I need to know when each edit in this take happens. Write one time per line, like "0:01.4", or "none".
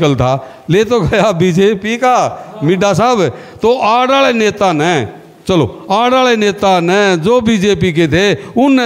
none